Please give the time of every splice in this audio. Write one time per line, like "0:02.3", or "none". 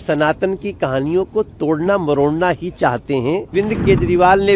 0:03.5